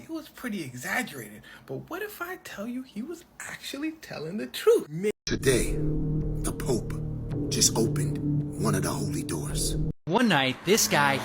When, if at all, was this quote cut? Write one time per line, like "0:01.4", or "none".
0:05.1
0:10.0